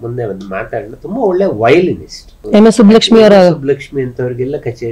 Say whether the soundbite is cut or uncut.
cut